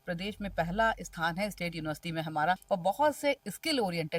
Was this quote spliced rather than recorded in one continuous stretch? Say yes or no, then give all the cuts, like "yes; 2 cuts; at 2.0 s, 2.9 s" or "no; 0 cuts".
yes; 1 cut; at 2.6 s